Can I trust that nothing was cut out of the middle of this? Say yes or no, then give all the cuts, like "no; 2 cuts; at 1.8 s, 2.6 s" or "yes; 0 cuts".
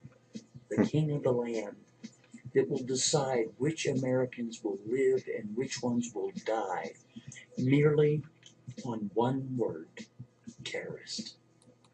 no; 1 cut; at 5.7 s